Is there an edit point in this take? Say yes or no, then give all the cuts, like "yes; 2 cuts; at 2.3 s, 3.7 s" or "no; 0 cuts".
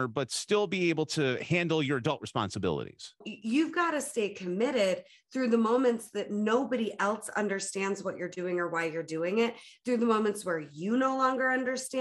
yes; 1 cut; at 3.3 s